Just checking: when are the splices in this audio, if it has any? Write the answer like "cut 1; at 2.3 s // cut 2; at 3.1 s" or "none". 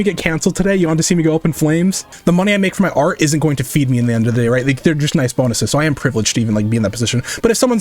cut 1; at 2.1 s